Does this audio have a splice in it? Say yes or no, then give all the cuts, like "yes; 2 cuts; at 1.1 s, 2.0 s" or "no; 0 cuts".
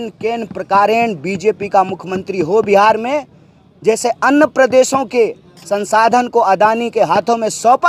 no; 0 cuts